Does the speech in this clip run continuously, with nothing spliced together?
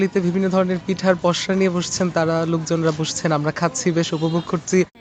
yes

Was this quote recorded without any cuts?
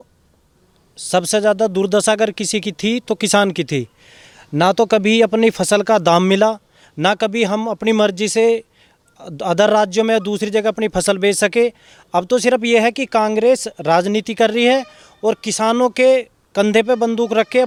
yes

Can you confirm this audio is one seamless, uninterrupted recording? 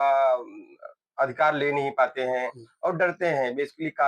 yes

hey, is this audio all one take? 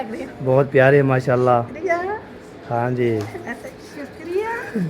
yes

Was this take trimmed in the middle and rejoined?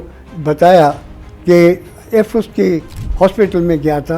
yes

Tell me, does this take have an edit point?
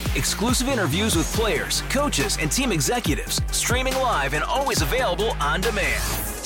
no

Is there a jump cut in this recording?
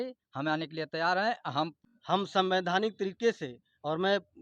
yes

